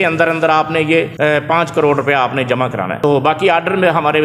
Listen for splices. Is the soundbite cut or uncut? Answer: cut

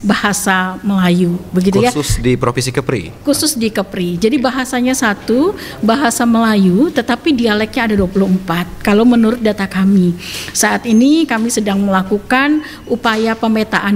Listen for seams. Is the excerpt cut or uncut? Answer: uncut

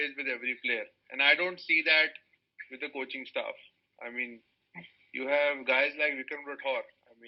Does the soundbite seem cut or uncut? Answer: uncut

